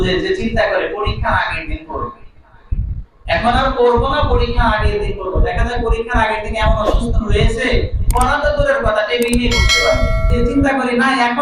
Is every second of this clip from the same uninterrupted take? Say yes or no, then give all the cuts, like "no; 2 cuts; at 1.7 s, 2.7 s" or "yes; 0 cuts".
no; 1 cut; at 10.2 s